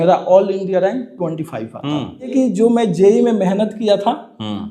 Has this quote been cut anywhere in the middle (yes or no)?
yes